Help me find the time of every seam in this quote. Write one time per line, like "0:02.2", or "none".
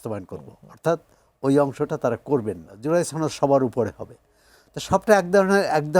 0:02.7